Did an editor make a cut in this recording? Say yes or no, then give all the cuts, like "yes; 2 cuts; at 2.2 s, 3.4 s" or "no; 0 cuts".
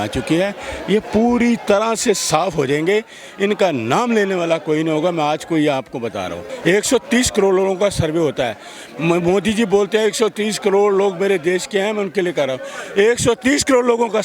yes; 1 cut; at 6.4 s